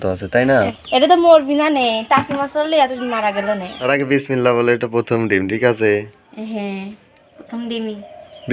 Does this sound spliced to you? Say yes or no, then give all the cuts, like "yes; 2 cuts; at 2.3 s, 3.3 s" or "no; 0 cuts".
yes; 1 cut; at 3.9 s